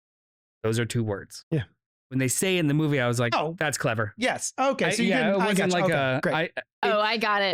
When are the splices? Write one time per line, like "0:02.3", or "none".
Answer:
none